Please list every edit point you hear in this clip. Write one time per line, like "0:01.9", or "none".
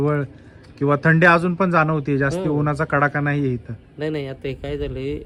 none